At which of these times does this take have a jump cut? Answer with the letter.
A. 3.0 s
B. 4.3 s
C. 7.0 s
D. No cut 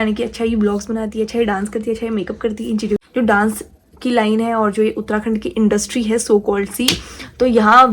A